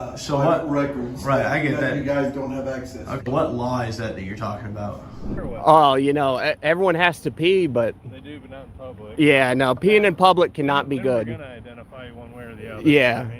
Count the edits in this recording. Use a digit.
1